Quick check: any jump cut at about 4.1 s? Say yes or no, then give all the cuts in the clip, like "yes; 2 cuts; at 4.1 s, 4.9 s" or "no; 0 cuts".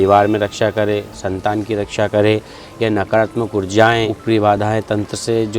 yes; 1 cut; at 4.1 s